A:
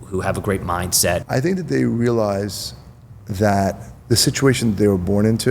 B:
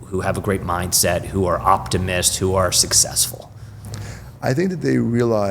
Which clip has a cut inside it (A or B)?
A